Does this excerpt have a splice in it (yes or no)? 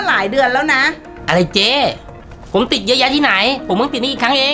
no